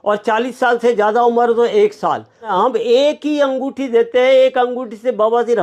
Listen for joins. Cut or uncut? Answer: cut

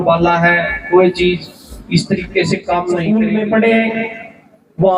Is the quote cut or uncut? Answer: cut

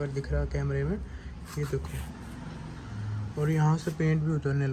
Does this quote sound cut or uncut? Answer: uncut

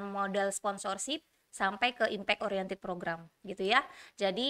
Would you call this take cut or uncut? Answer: uncut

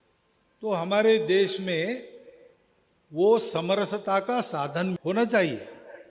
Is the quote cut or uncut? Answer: cut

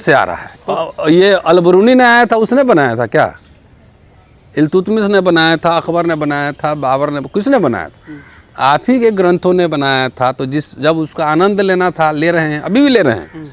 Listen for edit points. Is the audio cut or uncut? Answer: uncut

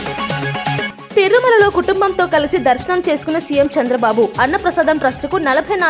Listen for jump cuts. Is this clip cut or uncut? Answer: cut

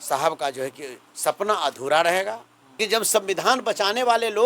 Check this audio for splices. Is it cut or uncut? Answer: cut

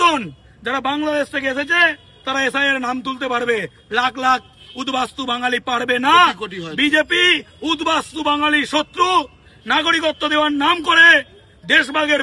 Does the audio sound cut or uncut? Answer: uncut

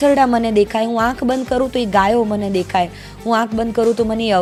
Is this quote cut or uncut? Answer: uncut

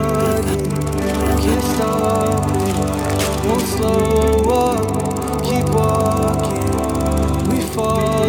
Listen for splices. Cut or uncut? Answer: uncut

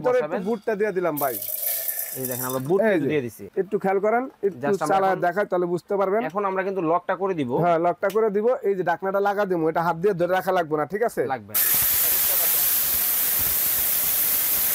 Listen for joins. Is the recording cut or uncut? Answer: cut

